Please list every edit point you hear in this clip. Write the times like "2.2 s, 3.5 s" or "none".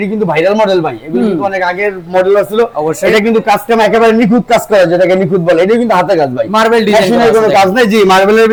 none